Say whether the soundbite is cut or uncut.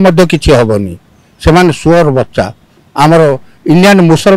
uncut